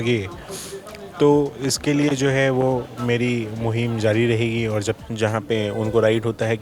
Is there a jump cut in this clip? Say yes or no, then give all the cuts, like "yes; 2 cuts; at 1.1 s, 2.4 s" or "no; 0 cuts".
yes; 1 cut; at 5.0 s